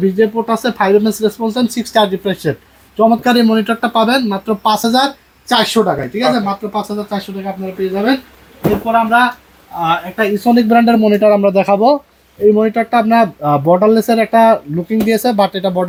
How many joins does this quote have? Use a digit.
0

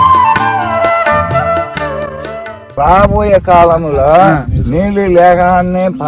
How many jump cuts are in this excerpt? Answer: 1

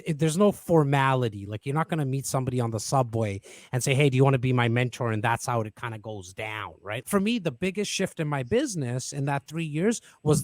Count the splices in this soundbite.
1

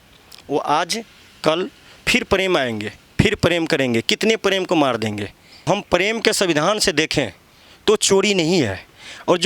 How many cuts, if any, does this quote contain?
1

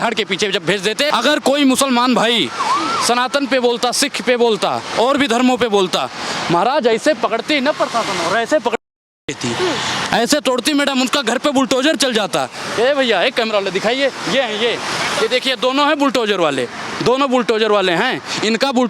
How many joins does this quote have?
1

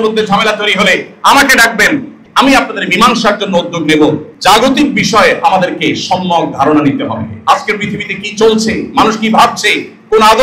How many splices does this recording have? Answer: 2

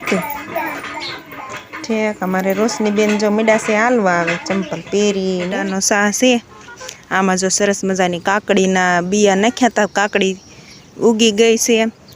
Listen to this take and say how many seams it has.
1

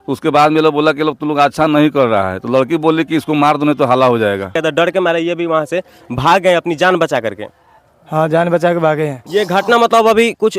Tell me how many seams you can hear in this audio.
2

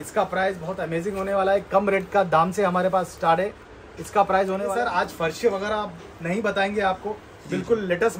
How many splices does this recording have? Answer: 1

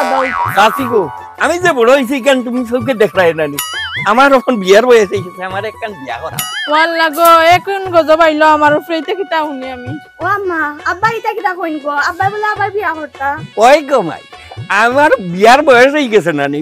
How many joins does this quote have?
0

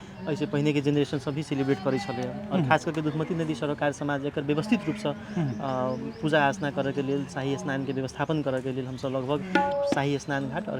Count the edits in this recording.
1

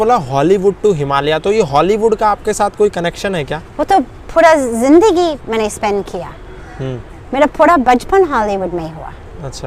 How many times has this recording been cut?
0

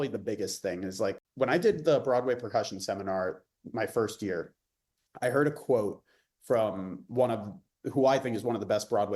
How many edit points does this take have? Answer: 1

